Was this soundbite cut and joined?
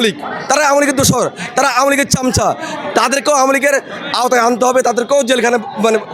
no; 0 cuts

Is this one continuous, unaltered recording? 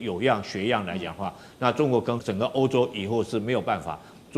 no; 1 cut; at 2.2 s

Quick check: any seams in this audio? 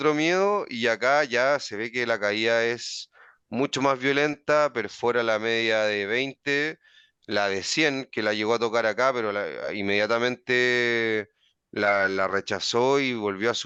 no; 0 cuts

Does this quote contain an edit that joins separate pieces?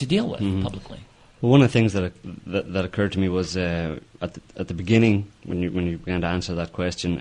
yes; 1 cut; at 1.8 s

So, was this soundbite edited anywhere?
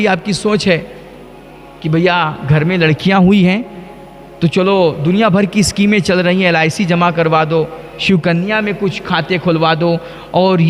no; 0 cuts

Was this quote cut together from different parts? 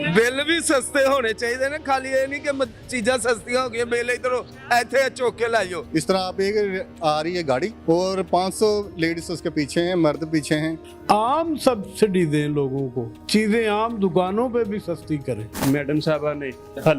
yes; 3 cuts; at 5.8 s, 10.8 s, 15.5 s

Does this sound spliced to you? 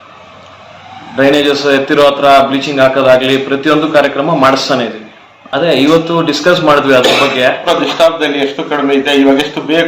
yes; 1 cut; at 7.6 s

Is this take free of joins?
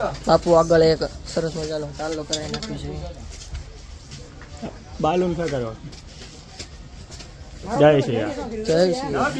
yes; 0 cuts

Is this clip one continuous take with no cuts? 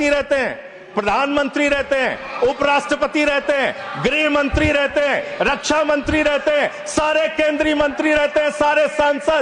yes; 0 cuts

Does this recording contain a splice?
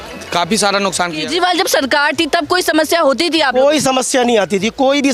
yes; 1 cut; at 1.2 s

